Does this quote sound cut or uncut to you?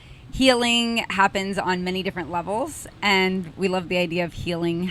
uncut